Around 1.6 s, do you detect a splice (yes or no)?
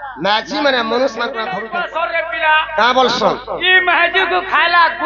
yes